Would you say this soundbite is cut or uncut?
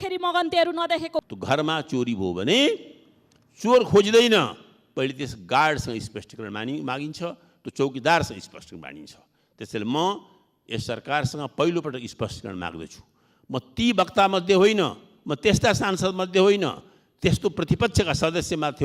cut